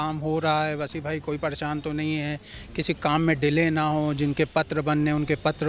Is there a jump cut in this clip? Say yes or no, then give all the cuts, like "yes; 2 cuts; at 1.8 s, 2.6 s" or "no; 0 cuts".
no; 0 cuts